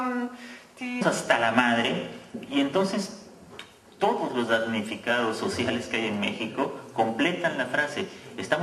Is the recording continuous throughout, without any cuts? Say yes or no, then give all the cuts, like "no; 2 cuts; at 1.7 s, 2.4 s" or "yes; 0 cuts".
yes; 0 cuts